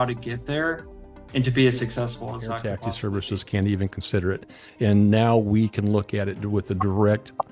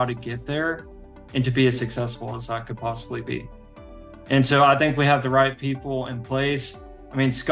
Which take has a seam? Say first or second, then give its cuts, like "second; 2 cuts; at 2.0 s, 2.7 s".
first; 1 cut; at 2.9 s